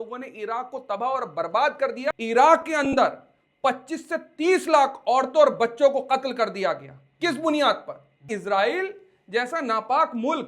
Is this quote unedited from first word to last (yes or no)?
no